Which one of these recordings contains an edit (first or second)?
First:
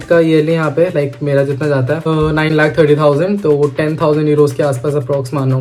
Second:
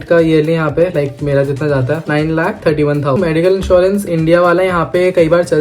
second